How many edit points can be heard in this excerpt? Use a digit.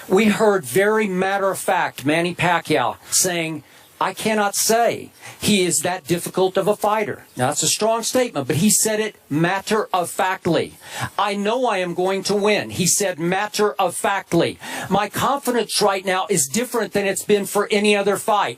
1